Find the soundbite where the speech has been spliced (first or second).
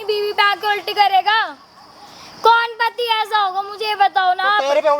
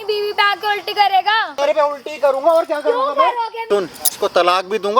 second